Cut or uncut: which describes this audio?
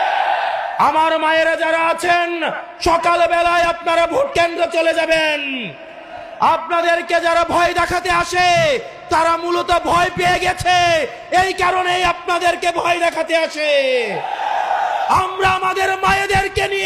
uncut